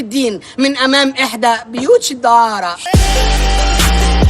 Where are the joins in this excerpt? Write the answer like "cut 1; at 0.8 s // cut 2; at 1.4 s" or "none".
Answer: cut 1; at 2.9 s

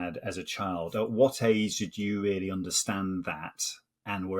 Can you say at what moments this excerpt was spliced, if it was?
none

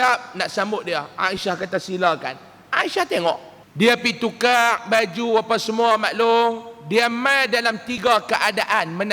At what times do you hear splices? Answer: cut 1; at 3.6 s

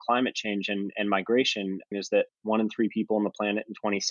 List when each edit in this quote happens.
cut 1; at 2.0 s

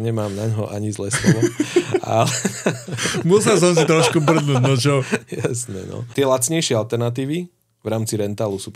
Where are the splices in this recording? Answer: none

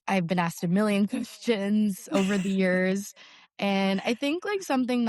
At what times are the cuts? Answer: none

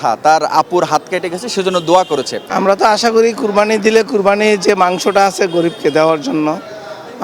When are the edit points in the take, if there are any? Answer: cut 1; at 2.4 s

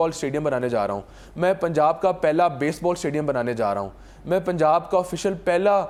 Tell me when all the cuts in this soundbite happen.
none

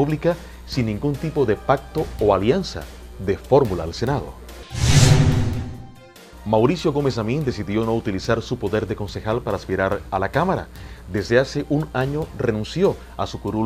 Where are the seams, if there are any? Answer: cut 1; at 8.6 s

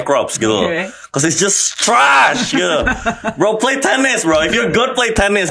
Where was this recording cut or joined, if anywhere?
none

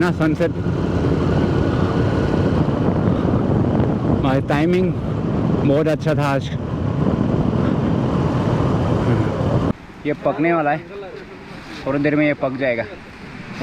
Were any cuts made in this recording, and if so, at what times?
cut 1; at 9.7 s

